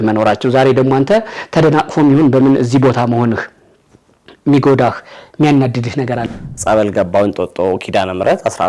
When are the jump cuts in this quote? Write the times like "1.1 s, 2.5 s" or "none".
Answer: 6.2 s